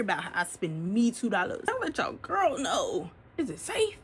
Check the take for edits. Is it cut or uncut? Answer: cut